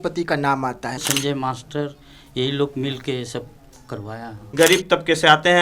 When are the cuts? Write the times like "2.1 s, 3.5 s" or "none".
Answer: 1.0 s, 4.4 s